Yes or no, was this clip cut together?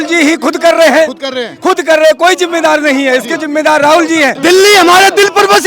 yes